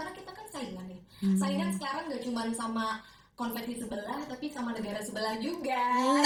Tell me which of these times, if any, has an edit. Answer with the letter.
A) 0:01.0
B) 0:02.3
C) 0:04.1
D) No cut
D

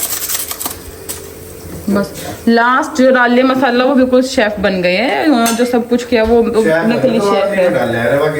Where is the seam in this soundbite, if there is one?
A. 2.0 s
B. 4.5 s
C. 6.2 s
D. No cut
D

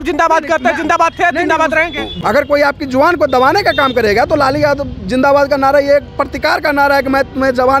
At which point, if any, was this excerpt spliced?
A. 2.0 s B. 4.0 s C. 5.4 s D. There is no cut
A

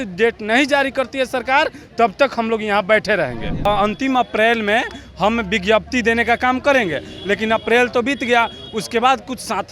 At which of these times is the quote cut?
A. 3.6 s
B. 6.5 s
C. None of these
A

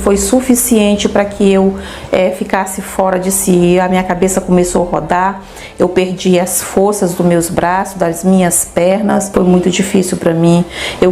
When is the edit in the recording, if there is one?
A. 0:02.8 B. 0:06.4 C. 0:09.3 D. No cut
C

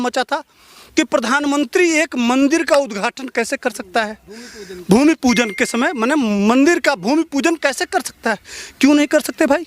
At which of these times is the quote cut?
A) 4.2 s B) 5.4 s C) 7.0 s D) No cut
D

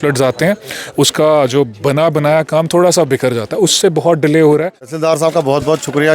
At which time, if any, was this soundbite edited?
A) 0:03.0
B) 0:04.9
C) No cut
B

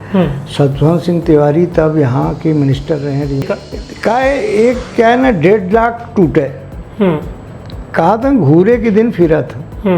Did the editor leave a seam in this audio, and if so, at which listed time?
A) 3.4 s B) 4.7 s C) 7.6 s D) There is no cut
A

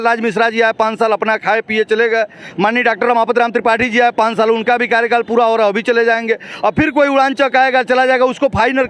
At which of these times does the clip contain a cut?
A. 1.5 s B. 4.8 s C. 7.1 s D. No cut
D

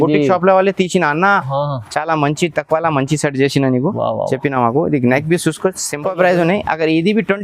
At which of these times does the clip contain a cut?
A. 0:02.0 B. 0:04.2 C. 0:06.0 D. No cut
C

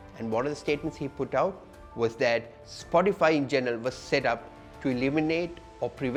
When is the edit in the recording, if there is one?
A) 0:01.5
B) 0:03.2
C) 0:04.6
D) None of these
D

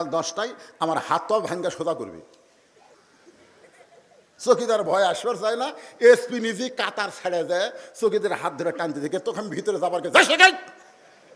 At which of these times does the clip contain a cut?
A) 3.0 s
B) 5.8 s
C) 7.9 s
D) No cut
A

